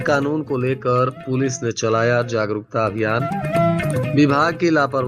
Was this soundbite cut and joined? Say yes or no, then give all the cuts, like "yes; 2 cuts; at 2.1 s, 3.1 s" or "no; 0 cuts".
no; 0 cuts